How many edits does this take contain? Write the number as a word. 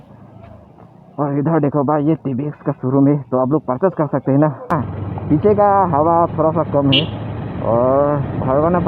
one